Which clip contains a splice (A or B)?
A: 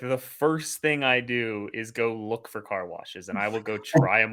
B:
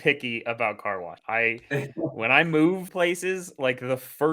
B